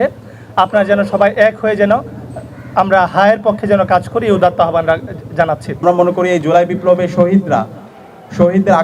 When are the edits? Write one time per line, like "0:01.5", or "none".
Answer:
0:05.8